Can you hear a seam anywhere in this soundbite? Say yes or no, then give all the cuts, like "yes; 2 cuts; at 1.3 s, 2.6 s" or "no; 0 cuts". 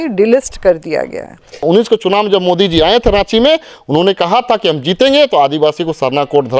yes; 1 cut; at 1.6 s